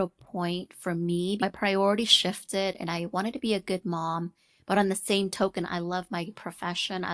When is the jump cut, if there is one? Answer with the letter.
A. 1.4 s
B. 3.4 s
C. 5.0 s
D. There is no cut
A